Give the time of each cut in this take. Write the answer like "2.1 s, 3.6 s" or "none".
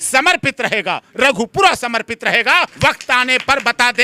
2.7 s